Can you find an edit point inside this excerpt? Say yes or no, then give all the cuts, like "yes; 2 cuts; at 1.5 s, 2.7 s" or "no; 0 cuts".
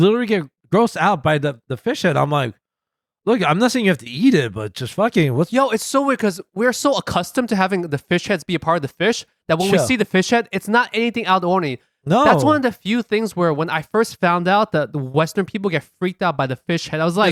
no; 0 cuts